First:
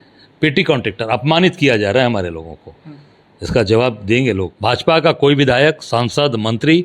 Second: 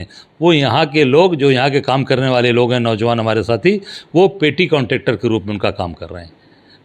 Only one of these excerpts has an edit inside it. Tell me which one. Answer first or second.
first